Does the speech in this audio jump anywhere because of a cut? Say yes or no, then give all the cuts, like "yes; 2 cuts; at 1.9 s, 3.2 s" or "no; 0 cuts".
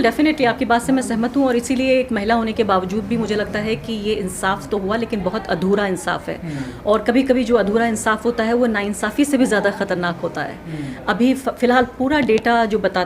no; 0 cuts